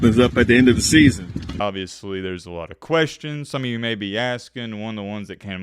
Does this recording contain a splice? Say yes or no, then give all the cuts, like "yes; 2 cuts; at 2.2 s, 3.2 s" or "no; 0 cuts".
yes; 1 cut; at 1.6 s